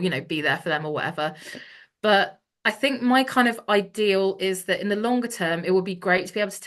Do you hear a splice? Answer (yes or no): no